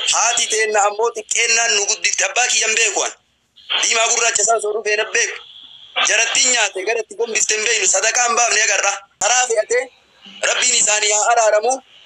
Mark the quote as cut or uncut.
cut